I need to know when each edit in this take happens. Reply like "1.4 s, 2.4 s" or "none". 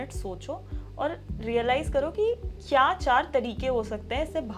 none